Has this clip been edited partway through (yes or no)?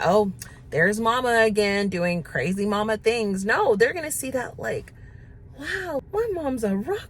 yes